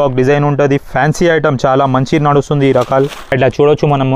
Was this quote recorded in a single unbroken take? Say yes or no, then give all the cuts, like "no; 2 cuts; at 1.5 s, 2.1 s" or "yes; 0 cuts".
no; 1 cut; at 3.2 s